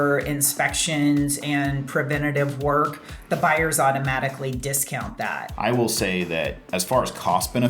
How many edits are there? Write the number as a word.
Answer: two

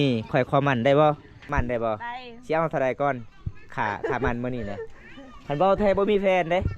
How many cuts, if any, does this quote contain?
one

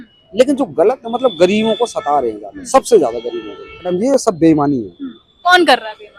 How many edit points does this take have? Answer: one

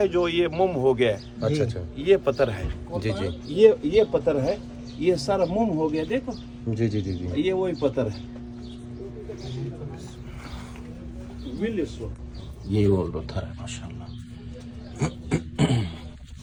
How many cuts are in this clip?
zero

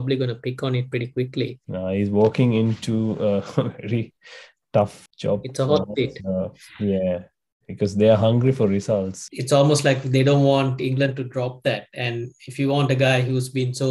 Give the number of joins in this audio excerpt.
three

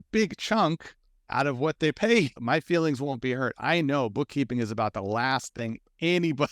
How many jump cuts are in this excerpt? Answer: one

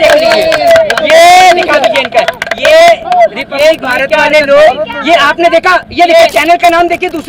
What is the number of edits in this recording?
zero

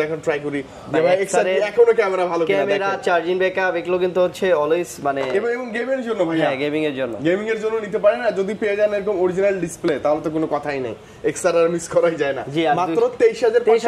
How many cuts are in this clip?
zero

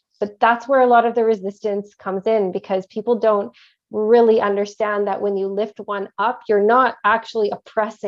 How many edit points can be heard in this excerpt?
zero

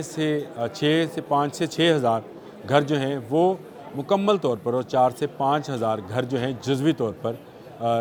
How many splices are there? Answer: zero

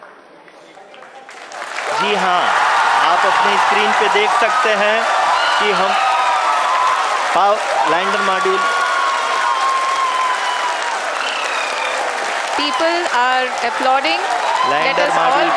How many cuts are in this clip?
zero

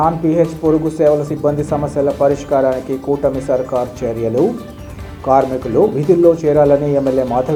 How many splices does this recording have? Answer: zero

